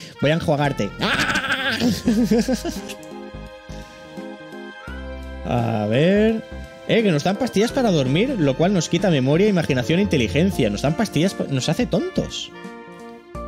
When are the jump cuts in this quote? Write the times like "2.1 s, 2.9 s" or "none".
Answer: none